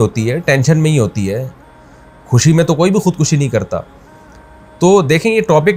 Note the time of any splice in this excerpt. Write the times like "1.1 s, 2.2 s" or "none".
none